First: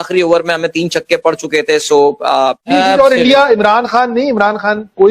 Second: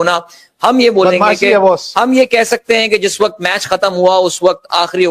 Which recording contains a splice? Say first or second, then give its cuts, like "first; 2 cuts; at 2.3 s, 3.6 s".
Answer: first; 1 cut; at 2.7 s